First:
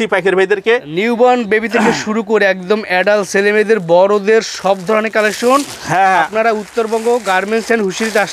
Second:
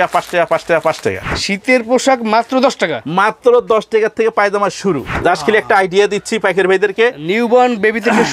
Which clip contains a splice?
second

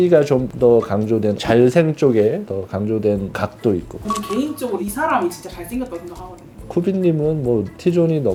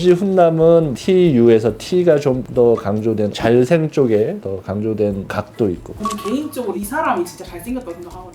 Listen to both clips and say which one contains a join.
second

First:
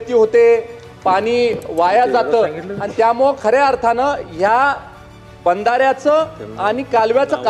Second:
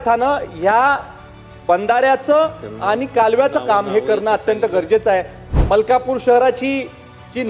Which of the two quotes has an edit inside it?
second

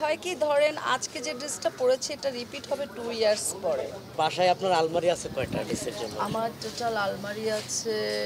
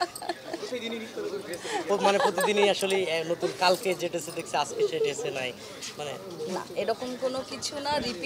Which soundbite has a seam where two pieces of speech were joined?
first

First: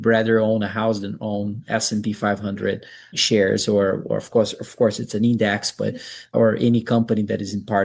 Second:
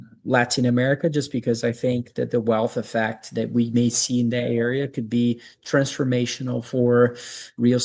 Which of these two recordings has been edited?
first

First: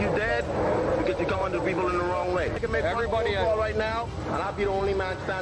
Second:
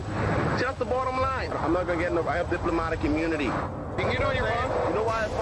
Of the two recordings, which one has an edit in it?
first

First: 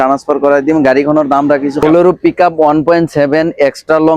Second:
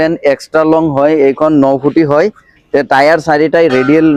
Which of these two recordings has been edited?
first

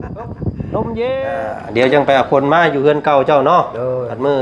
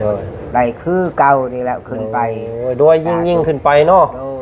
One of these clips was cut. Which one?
first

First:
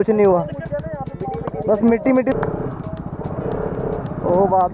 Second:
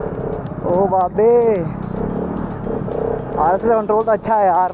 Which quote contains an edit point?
first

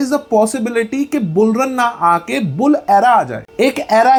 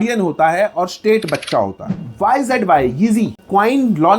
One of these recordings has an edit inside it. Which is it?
second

